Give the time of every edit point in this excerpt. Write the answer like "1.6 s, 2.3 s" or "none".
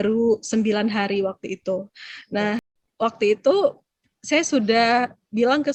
none